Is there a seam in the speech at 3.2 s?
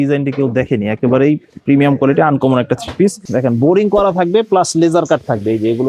yes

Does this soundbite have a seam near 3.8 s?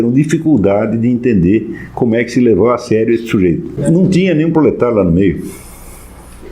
yes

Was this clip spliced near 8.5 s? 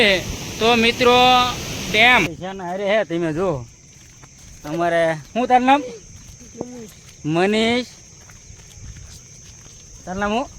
no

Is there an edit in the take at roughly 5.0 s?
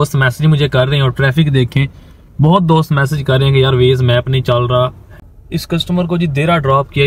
yes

